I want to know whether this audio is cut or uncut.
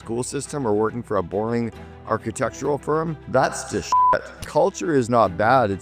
cut